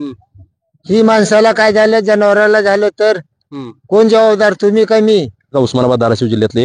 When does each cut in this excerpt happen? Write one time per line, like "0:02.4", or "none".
0:05.5